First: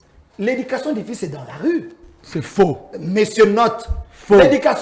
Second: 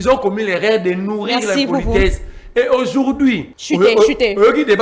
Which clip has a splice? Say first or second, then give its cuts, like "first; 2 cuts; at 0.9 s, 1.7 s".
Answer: second; 1 cut; at 3.5 s